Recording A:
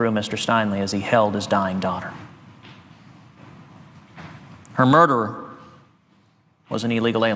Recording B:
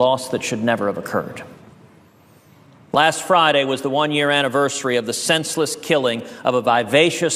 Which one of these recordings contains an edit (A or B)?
A